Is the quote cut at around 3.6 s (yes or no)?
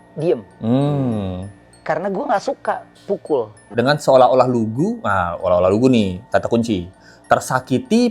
yes